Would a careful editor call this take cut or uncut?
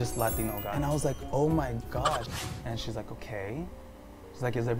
cut